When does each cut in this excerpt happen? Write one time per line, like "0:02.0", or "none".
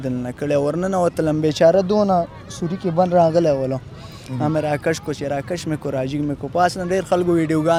none

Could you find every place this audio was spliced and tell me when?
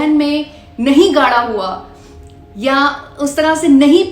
none

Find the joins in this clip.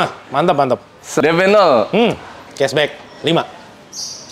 0:01.0
0:02.3

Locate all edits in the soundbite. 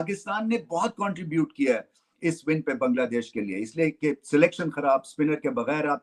none

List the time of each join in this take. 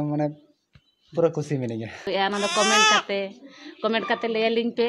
0:02.1

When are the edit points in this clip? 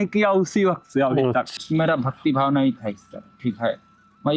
0:01.6

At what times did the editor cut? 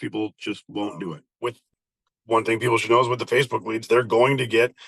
0:01.3

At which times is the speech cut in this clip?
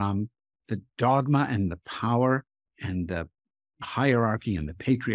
0:03.9

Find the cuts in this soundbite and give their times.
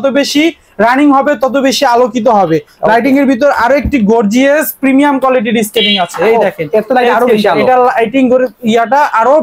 none

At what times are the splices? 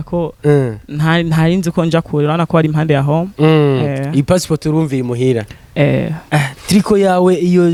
none

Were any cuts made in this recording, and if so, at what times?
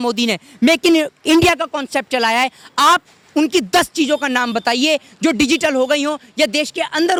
none

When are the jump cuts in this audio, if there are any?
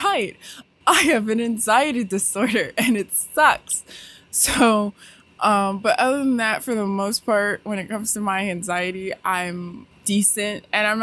0:09.8

